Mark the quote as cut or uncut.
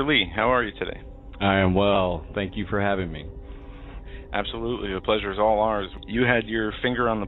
uncut